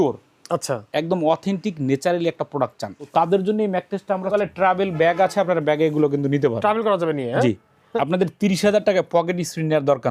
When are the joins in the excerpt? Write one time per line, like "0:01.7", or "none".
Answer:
0:03.1
0:04.3
0:07.8